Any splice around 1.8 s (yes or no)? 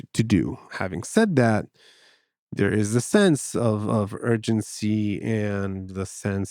no